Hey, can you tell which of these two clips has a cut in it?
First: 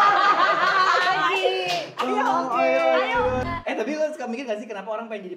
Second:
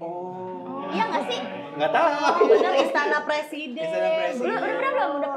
first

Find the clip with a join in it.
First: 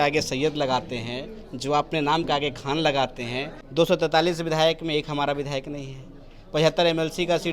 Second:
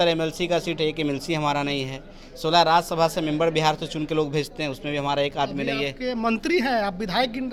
first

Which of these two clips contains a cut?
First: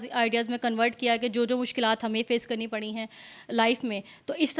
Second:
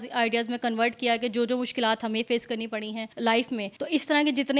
second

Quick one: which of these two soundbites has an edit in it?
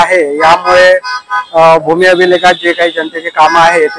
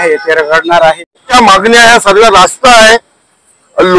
second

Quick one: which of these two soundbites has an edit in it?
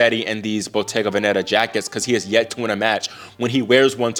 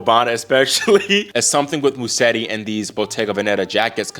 second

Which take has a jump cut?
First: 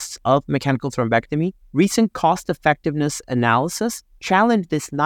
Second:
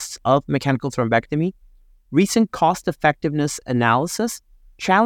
first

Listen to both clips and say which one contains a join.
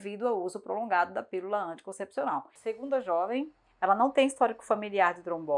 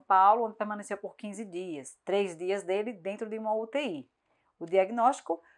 first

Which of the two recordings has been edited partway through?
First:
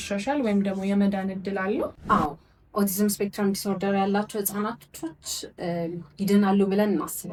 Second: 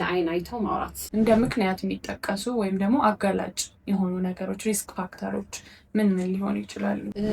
second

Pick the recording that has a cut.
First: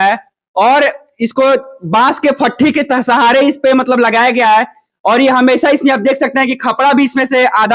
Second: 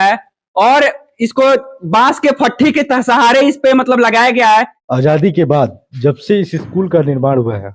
second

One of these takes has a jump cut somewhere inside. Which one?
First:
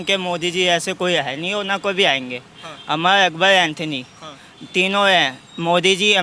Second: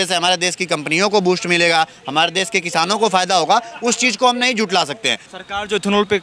second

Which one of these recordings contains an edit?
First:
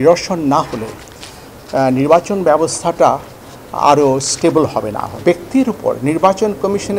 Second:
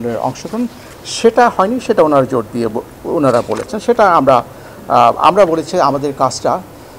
first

